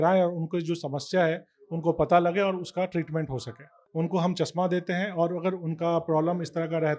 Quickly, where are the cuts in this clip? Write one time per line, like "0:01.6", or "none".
0:03.8